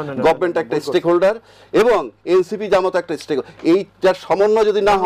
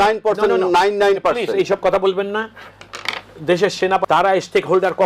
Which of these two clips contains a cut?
second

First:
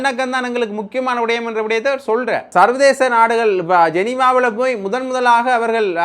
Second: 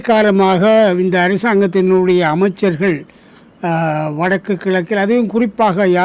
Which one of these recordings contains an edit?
first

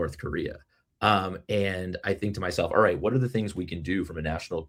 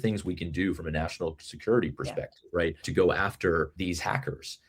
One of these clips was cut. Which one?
second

